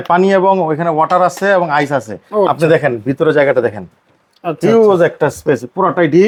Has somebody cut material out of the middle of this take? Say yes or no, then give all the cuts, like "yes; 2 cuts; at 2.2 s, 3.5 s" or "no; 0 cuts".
no; 0 cuts